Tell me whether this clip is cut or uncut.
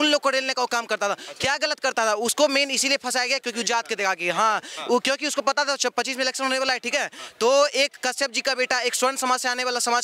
uncut